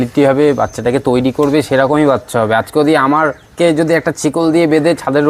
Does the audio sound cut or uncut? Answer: uncut